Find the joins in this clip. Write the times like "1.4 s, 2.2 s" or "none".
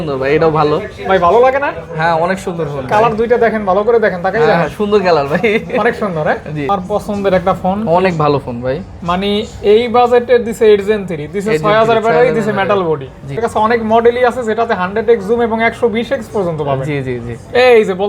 6.7 s, 13.4 s

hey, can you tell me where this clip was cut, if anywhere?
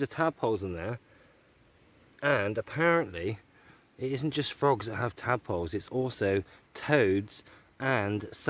none

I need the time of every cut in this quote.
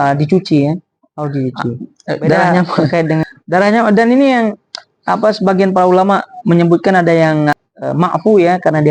1.9 s, 7.6 s

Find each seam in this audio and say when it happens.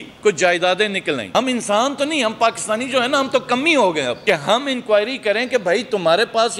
1.3 s, 4.2 s

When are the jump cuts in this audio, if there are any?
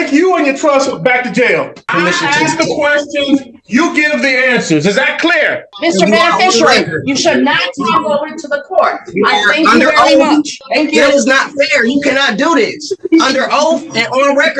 1.9 s, 5.7 s, 10.6 s

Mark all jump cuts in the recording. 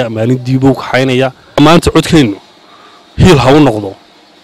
1.6 s

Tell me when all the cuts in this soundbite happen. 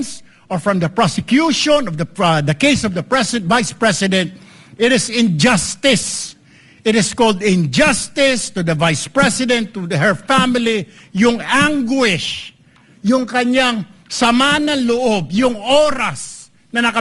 none

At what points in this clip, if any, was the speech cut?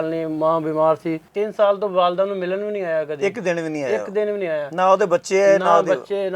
1.2 s

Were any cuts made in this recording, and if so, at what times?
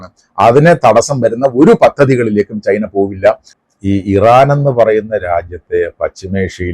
3.5 s

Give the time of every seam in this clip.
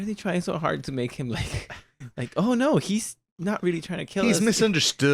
none

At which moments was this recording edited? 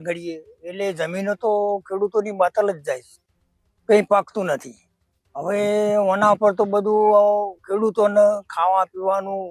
none

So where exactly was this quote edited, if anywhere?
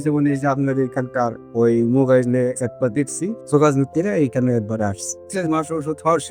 3.4 s, 5.2 s

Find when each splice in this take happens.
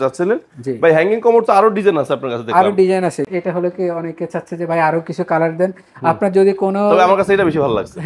3.3 s

